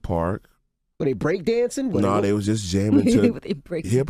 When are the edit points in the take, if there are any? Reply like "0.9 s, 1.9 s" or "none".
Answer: none